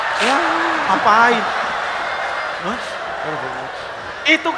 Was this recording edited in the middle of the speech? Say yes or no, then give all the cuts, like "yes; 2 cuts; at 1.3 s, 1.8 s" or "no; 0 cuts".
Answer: no; 0 cuts